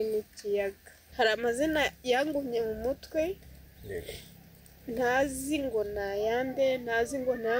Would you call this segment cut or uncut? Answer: cut